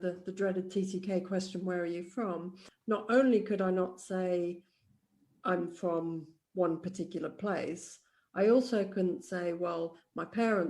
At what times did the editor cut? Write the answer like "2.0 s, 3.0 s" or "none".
2.6 s